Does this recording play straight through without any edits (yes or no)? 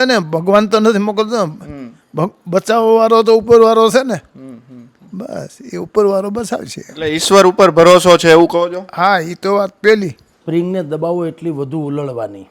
no